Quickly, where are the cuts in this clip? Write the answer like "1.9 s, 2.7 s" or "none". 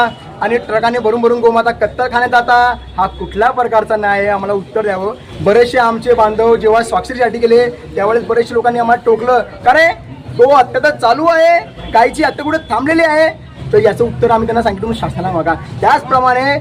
none